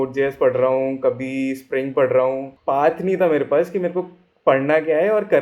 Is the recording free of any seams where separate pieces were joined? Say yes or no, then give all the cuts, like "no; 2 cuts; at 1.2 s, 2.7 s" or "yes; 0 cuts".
no; 1 cut; at 2.5 s